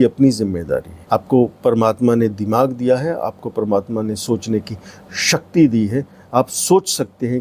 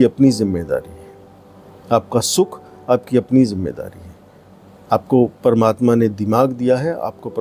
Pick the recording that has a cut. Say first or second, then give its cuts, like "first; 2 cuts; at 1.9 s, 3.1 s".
first; 1 cut; at 0.9 s